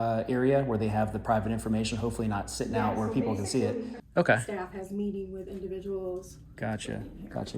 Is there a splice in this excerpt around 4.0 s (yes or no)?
yes